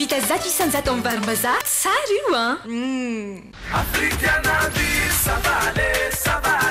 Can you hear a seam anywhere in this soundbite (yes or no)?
yes